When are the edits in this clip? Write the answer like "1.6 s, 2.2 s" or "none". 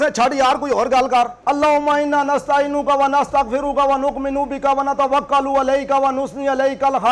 1.4 s